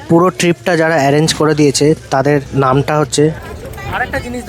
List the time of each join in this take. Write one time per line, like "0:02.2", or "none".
0:03.4